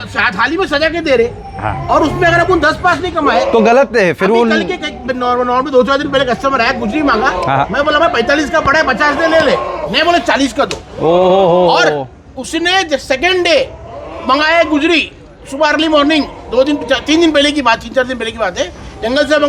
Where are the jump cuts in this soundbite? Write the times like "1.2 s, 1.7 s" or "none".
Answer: none